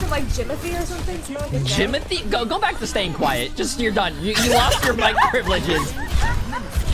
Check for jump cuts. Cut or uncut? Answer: uncut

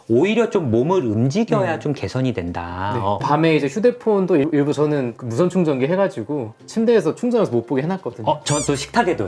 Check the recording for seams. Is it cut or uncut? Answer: cut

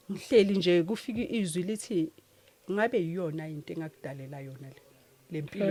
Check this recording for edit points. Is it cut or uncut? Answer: uncut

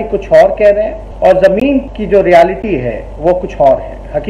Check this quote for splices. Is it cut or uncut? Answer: cut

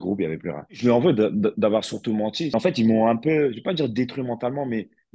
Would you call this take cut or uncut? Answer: cut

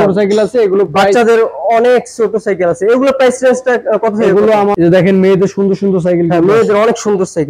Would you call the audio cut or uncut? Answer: cut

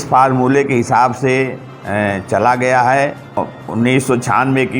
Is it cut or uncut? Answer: cut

